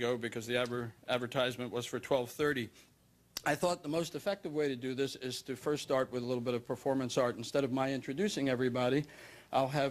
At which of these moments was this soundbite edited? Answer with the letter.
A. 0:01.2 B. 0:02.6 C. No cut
A